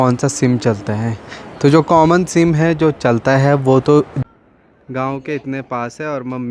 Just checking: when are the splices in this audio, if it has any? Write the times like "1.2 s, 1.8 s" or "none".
4.2 s